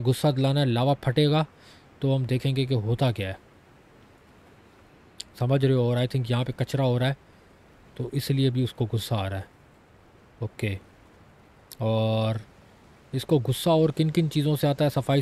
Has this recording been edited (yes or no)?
no